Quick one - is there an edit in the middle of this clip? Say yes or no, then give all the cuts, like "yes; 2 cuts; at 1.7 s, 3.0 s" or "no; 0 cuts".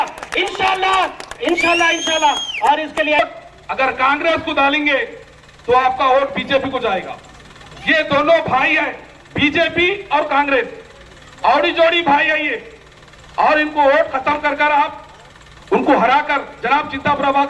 yes; 1 cut; at 3.2 s